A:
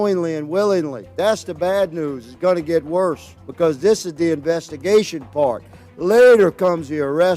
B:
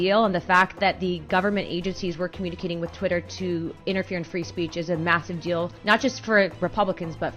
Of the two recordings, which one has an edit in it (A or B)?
B